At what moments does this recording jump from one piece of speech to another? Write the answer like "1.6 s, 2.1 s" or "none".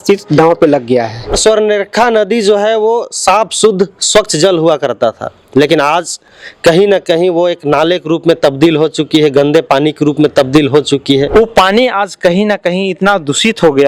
1.4 s, 11.3 s